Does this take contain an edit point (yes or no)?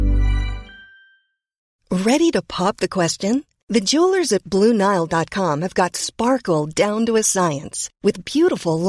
yes